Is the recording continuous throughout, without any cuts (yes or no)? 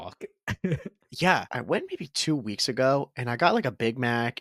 no